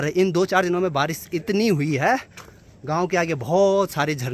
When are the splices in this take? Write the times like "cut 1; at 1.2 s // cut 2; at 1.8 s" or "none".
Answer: none